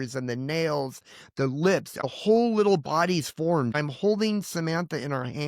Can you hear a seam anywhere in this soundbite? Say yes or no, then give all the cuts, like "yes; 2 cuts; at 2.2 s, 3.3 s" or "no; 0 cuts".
yes; 2 cuts; at 2.0 s, 3.7 s